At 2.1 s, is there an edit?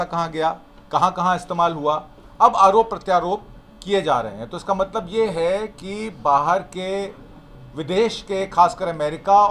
no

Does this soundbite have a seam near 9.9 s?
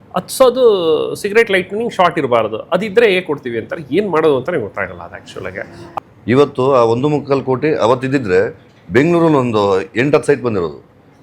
no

